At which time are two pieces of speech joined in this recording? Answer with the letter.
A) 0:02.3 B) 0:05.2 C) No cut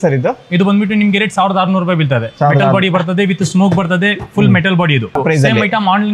B